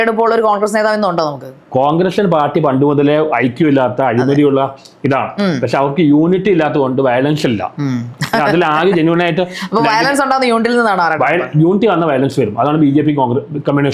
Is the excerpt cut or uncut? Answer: uncut